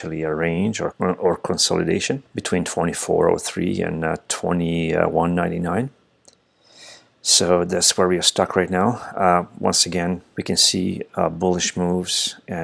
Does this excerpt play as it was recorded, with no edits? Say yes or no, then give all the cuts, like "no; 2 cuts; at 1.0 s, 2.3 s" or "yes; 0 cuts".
no; 3 cuts; at 0.9 s, 2.3 s, 10.3 s